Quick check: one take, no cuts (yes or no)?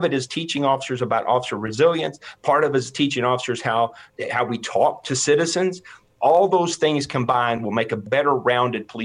no